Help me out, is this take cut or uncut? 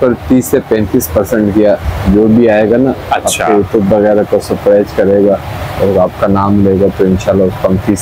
uncut